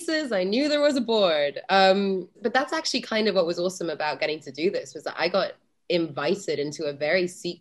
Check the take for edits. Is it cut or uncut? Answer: uncut